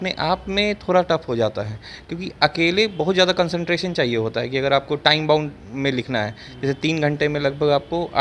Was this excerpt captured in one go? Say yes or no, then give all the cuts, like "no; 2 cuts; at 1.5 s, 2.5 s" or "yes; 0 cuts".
yes; 0 cuts